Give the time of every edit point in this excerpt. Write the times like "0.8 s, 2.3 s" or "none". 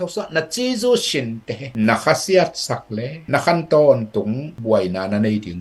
none